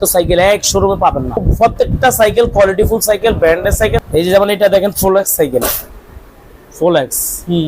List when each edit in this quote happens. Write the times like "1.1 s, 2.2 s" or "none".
1.4 s, 4.0 s